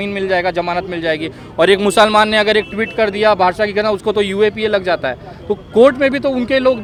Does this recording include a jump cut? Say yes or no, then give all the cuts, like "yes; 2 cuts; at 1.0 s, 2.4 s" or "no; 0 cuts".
no; 0 cuts